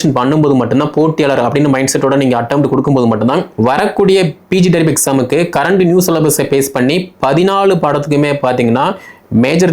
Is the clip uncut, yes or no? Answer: no